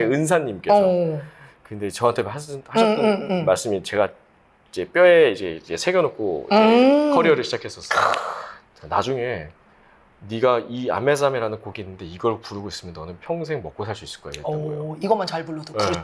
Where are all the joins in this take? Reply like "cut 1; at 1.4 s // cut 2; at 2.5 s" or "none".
none